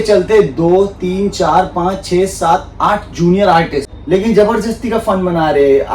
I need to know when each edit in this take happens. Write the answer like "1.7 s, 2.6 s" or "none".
4.0 s